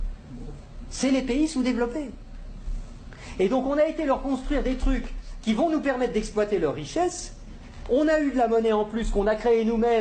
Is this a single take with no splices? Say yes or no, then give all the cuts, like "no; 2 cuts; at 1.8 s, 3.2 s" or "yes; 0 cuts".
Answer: yes; 0 cuts